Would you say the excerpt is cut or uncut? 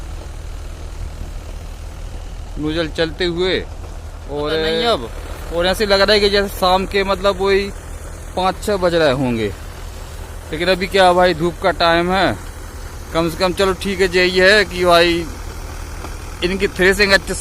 cut